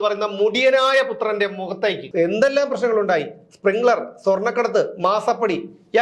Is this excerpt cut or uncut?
cut